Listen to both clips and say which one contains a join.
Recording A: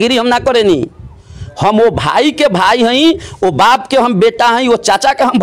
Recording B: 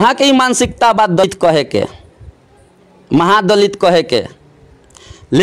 B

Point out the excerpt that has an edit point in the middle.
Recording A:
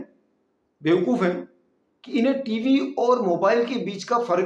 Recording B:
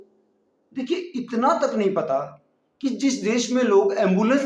B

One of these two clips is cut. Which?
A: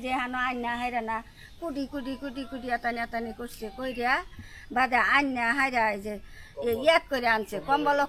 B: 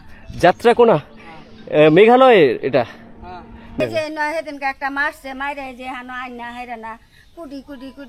B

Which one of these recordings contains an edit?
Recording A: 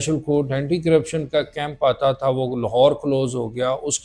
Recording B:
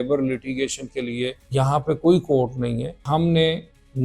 B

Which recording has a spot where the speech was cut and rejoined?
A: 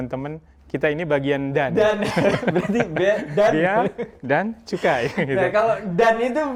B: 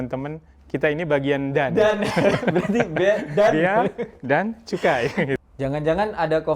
B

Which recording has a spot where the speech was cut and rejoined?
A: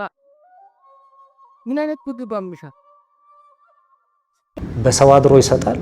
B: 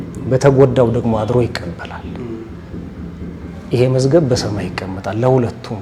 A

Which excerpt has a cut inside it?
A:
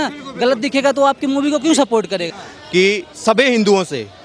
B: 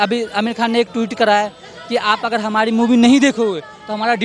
A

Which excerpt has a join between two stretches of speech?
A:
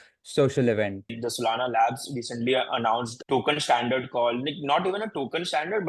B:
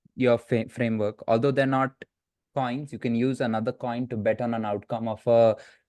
A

